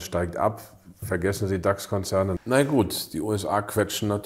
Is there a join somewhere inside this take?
yes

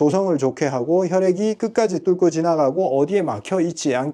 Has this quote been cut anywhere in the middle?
no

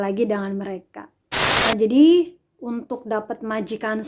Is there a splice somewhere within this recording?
yes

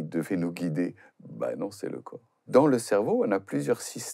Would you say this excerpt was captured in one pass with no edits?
no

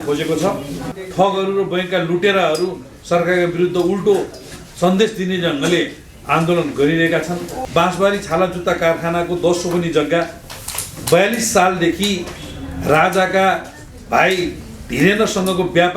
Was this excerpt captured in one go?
no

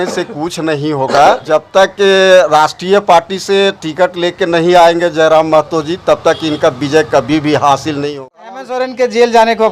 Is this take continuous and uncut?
no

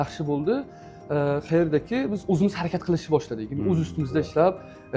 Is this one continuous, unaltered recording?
yes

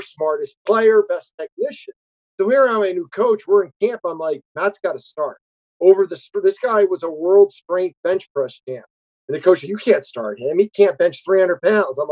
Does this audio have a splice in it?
no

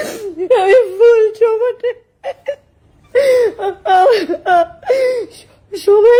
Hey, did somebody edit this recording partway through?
no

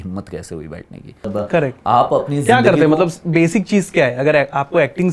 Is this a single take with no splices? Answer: no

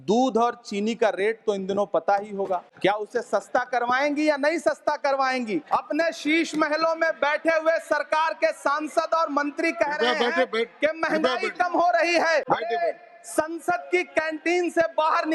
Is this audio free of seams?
no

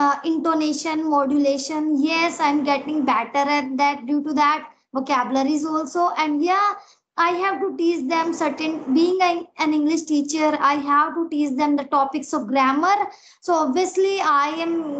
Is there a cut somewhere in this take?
no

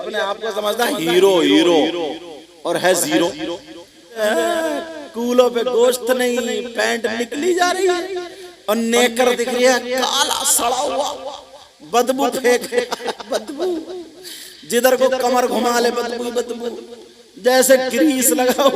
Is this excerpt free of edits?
no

